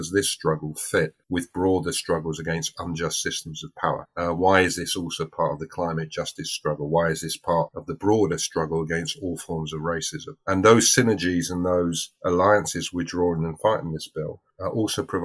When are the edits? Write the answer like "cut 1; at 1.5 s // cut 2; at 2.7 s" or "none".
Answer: cut 1; at 1.2 s